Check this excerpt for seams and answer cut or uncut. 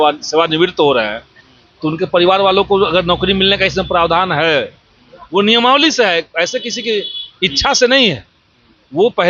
uncut